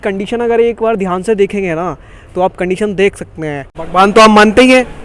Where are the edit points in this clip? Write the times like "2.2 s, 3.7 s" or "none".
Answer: 3.7 s